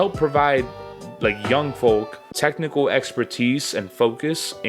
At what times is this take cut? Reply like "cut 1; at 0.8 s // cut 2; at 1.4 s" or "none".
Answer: cut 1; at 2.2 s